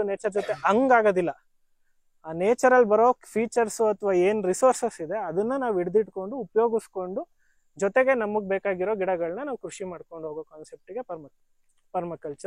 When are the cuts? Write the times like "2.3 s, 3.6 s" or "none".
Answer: none